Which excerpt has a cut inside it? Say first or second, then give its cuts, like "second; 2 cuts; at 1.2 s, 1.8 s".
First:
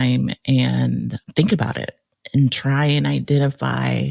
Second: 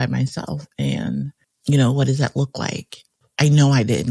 second; 1 cut; at 3.2 s